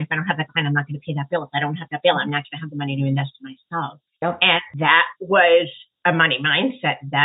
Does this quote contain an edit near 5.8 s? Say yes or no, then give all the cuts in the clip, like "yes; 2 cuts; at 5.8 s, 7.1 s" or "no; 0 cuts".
yes; 3 cuts; at 4.0 s, 5.1 s, 5.8 s